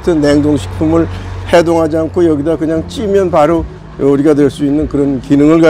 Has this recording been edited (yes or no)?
no